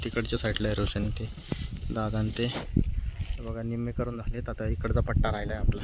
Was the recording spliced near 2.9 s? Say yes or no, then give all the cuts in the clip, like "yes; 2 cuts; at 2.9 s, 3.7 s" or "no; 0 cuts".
no; 0 cuts